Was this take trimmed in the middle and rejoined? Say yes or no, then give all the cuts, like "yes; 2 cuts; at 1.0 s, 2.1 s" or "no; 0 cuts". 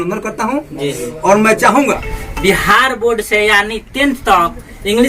yes; 1 cut; at 2.2 s